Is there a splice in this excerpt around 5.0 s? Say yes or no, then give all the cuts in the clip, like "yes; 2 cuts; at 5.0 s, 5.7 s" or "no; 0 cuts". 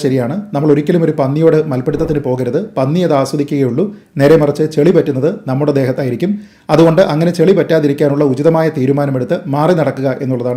no; 0 cuts